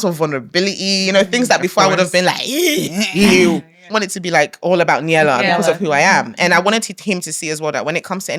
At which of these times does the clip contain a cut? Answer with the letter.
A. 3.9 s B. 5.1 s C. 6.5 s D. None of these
A